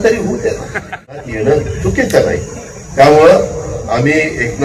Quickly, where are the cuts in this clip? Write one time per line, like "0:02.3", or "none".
0:01.1

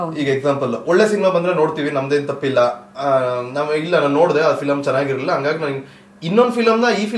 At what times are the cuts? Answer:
none

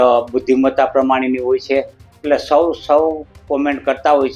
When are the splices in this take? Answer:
none

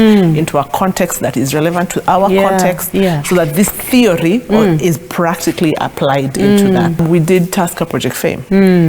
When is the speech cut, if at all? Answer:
0:07.0

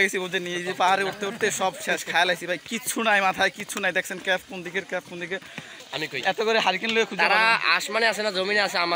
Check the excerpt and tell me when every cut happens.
0:05.8

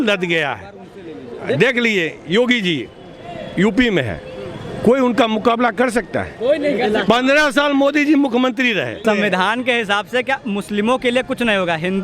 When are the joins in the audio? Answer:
0:09.0

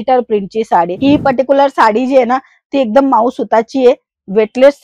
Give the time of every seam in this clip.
0:01.0

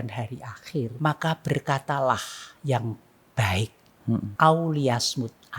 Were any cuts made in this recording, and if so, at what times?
0:00.9
0:04.3

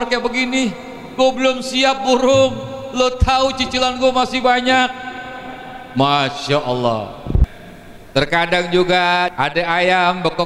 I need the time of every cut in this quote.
0:07.4
0:09.3

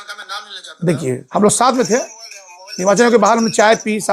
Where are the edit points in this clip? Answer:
0:01.2

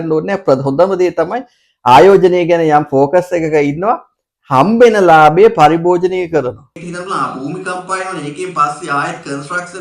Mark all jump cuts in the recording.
0:06.7

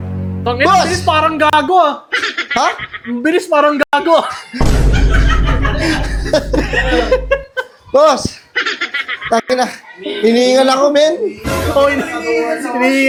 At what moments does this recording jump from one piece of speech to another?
none

